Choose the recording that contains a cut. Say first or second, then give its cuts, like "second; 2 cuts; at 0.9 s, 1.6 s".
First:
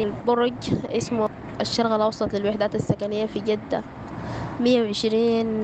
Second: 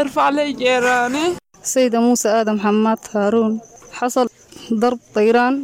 second; 2 cuts; at 1.5 s, 4.2 s